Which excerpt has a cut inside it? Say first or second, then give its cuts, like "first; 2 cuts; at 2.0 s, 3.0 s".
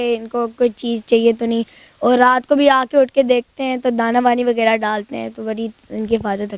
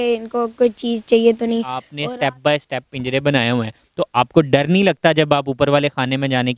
second; 1 cut; at 1.9 s